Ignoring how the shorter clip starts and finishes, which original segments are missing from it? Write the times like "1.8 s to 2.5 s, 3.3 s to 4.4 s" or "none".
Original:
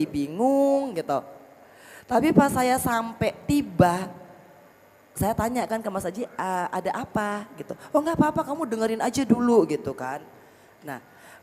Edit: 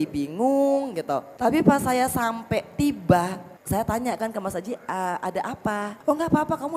1.3 s to 2.0 s, 4.2 s to 5.0 s, 7.4 s to 7.8 s